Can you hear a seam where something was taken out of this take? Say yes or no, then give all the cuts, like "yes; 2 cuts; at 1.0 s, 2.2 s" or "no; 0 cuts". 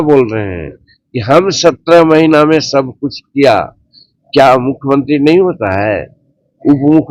no; 0 cuts